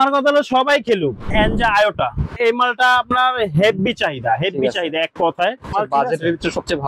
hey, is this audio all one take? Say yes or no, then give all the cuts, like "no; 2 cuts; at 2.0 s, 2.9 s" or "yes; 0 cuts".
no; 3 cuts; at 1.3 s, 2.4 s, 5.7 s